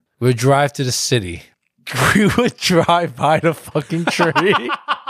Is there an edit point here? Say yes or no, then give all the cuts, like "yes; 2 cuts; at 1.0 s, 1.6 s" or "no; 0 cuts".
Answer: no; 0 cuts